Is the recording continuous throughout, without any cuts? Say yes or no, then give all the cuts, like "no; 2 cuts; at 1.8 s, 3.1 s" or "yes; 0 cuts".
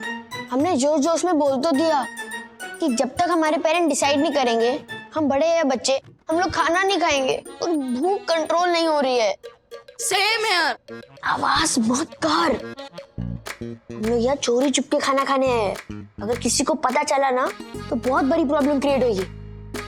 yes; 0 cuts